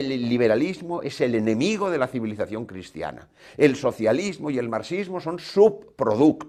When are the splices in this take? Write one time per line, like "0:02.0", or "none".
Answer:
none